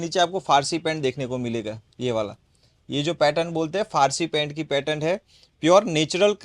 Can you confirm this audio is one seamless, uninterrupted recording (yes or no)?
yes